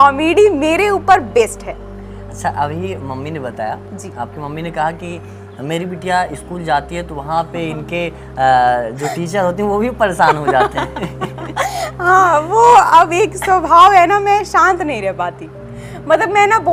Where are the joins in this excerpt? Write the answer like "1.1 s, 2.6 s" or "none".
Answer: none

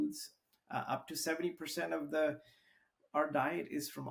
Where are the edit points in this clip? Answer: none

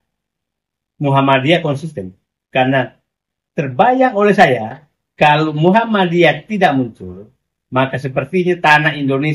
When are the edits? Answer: none

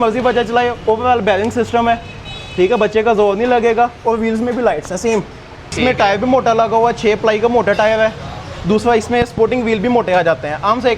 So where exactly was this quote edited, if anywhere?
5.8 s

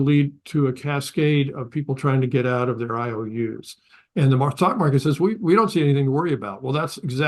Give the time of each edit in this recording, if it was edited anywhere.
3.8 s

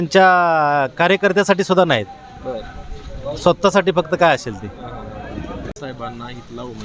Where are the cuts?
5.7 s

